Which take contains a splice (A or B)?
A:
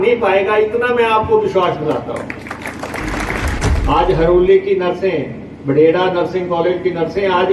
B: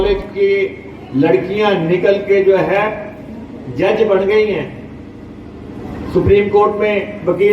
A